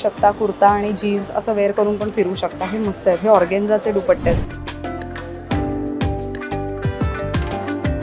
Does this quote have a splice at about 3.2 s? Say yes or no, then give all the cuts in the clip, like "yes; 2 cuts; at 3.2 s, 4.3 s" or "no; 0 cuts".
no; 1 cut; at 4.5 s